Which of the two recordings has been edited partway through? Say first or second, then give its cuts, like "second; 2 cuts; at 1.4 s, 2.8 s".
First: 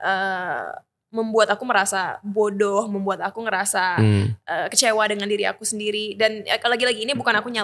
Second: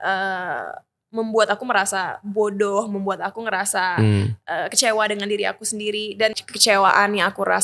second; 1 cut; at 6.5 s